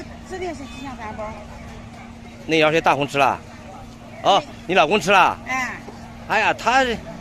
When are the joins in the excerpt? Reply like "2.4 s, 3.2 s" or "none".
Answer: none